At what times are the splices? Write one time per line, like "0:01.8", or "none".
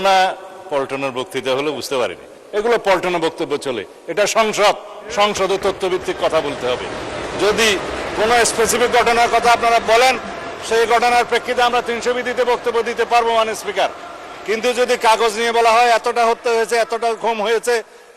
0:02.4